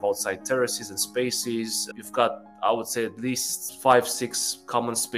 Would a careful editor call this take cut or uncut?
uncut